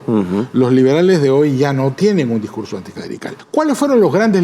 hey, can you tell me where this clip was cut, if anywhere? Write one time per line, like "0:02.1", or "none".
0:03.3

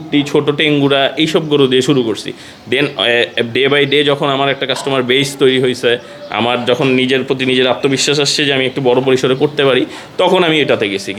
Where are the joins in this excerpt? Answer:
none

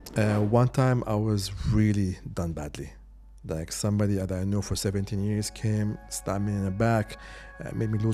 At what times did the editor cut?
none

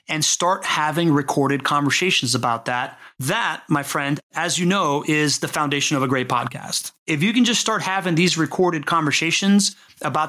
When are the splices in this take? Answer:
0:03.1

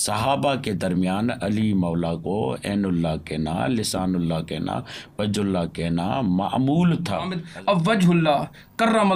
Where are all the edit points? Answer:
0:07.4

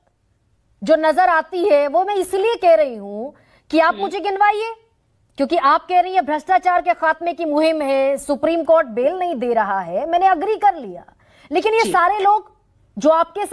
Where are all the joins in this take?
none

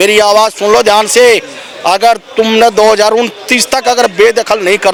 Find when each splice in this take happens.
none

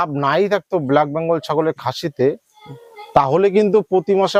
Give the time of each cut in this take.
none

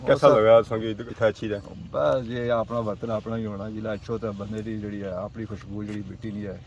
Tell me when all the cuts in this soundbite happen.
0:01.0

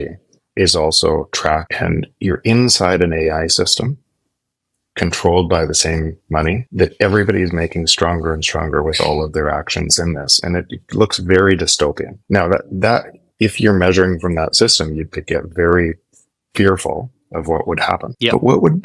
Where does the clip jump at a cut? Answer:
0:01.7
0:12.1

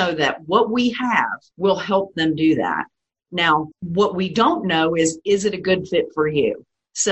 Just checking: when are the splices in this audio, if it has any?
0:01.4
0:03.8

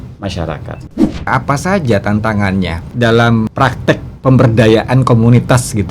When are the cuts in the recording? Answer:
0:01.3
0:02.8
0:03.5

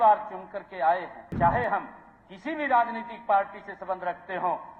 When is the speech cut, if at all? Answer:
0:01.2

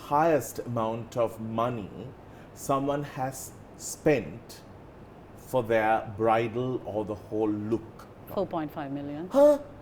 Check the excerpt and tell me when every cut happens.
0:08.2

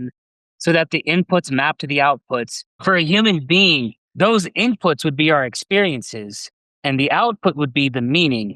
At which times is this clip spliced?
0:02.8
0:04.0

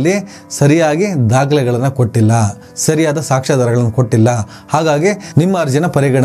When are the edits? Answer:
none

